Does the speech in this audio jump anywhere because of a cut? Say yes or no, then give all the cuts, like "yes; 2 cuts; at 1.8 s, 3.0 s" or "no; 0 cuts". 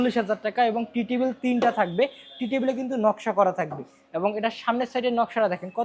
no; 0 cuts